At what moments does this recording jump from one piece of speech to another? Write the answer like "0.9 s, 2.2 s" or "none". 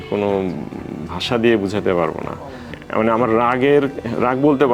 2.8 s